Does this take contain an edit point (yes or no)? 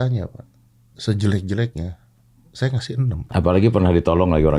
yes